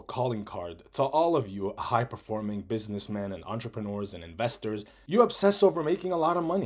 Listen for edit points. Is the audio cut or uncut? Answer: cut